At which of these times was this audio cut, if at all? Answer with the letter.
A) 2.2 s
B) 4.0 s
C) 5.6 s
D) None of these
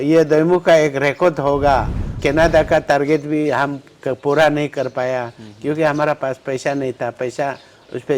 A